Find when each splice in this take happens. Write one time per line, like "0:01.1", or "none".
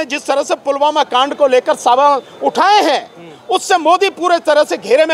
none

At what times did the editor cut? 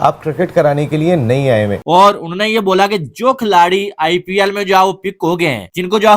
0:01.8

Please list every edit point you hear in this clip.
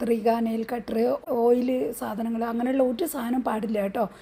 0:01.2

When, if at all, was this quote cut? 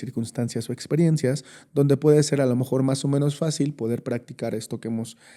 none

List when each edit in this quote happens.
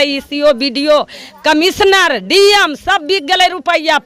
none

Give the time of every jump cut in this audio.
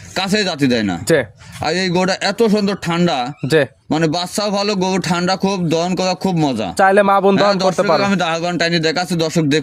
none

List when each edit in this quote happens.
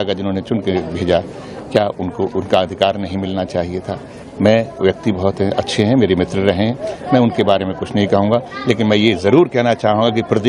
none

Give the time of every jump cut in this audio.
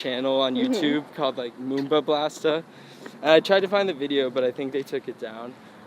none

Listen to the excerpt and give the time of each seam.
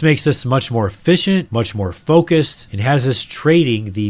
none

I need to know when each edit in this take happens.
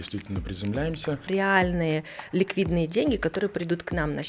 0:01.3

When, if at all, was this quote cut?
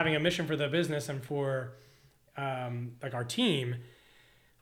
none

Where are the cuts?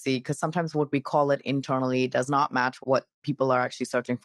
0:02.8

